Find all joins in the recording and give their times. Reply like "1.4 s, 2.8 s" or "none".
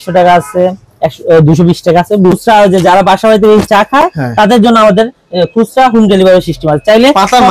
2.3 s

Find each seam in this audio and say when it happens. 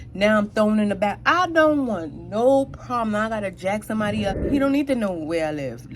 4.4 s

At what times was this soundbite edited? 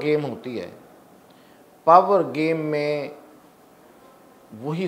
none

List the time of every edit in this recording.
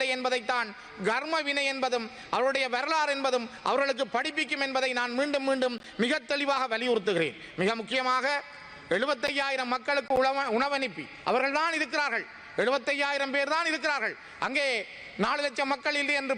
none

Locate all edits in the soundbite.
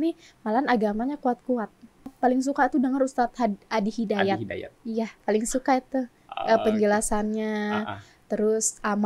2.1 s

